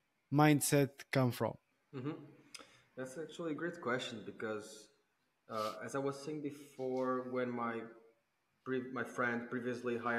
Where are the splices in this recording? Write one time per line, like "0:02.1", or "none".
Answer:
0:01.7